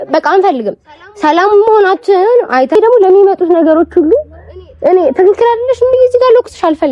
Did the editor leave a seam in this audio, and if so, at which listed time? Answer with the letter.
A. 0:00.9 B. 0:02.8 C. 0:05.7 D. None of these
B